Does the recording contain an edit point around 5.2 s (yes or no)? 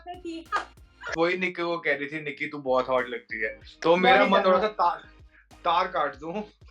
no